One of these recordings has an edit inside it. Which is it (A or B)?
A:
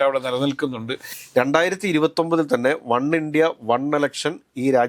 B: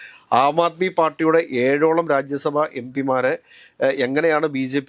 A